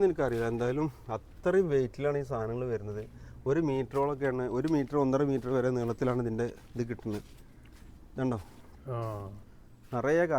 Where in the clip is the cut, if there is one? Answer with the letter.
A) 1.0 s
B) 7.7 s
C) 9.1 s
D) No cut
D